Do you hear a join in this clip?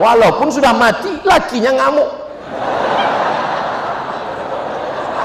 no; 0 cuts

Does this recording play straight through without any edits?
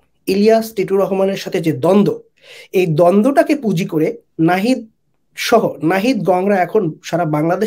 yes; 0 cuts

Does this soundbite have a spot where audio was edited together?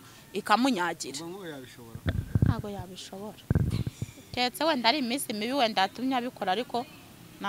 no; 0 cuts

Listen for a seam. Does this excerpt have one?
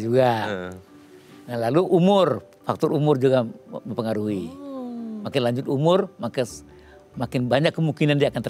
no; 0 cuts

